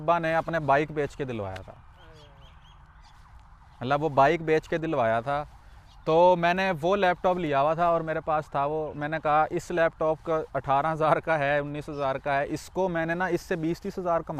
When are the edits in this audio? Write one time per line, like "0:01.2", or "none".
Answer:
none